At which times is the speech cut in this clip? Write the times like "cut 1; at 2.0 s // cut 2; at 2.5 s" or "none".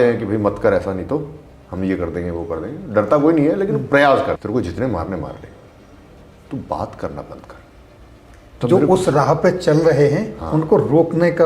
cut 1; at 4.4 s